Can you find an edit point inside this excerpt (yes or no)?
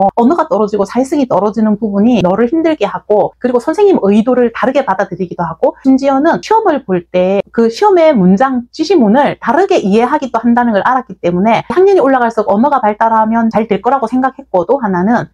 no